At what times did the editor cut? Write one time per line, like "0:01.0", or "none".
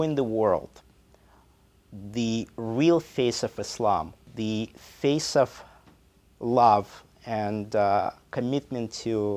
0:04.2